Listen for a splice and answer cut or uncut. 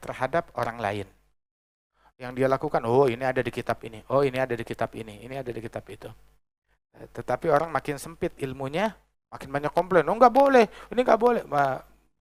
uncut